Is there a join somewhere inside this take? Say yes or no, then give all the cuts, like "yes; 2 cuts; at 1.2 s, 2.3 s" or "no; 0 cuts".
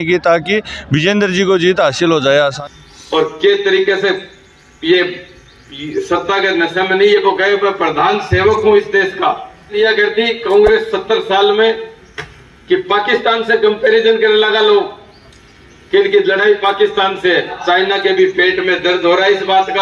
yes; 3 cuts; at 2.6 s, 9.8 s, 17.6 s